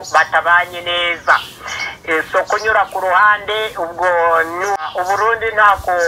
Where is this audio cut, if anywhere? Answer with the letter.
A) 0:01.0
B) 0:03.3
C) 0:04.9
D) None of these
C